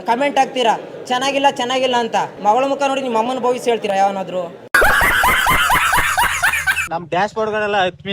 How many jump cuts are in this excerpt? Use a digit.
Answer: 2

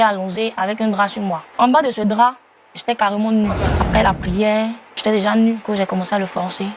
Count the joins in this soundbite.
4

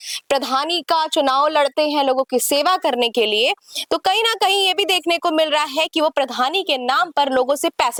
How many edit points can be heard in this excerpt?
0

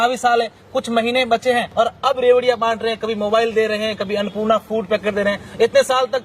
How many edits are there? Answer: 1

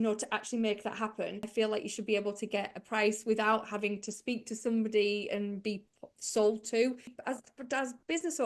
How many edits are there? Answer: 2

